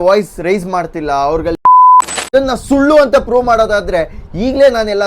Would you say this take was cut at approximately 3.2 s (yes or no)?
no